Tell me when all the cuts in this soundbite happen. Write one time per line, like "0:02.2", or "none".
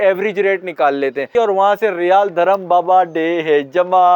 0:01.3

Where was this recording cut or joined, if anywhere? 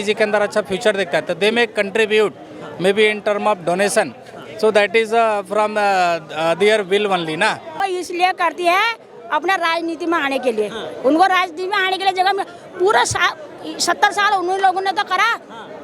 0:07.7

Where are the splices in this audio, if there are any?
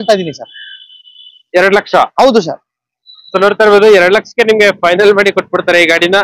none

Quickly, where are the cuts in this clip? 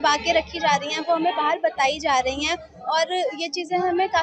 none

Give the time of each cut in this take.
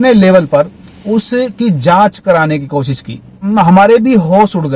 0:03.5

